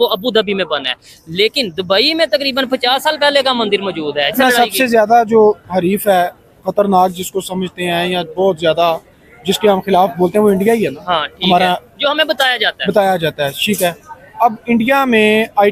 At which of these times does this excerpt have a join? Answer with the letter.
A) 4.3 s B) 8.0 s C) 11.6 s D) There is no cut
A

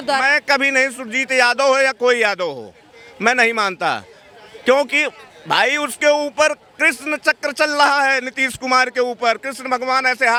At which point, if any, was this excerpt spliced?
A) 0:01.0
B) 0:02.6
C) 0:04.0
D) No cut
D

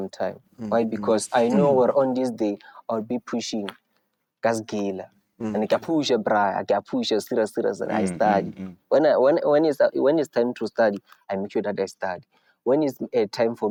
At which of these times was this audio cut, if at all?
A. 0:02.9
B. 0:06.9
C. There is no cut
C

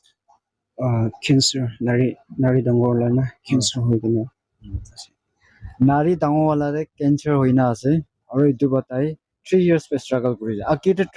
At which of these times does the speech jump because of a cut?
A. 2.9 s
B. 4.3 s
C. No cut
C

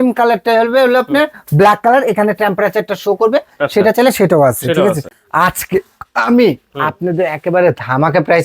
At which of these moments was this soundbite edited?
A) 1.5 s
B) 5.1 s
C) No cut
B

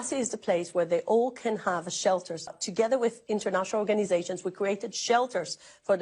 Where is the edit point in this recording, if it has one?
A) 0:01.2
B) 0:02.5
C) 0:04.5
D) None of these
B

